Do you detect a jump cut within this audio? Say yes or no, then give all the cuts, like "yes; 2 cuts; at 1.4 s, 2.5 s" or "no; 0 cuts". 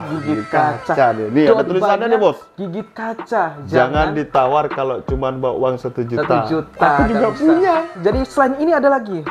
yes; 1 cut; at 7.9 s